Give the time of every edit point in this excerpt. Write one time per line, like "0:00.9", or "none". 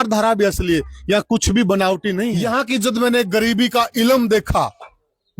0:02.3